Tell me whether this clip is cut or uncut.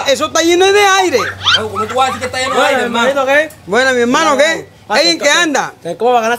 uncut